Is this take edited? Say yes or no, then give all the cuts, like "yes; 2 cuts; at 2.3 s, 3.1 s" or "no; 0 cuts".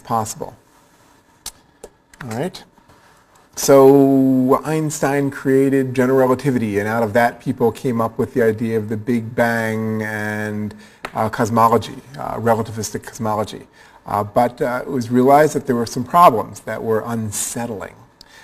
yes; 1 cut; at 14.3 s